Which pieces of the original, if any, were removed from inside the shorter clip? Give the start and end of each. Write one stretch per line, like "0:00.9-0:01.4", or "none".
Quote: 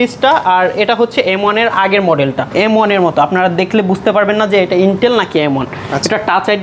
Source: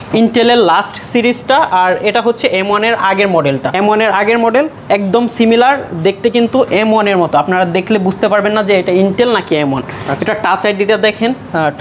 0:03.8-0:06.7